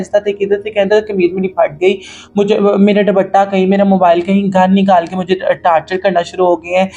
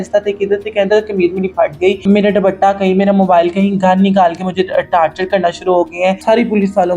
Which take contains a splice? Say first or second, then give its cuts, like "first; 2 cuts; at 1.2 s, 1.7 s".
second; 2 cuts; at 2.0 s, 6.2 s